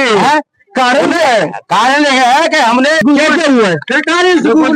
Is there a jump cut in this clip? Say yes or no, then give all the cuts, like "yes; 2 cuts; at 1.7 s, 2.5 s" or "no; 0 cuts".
yes; 1 cut; at 3.0 s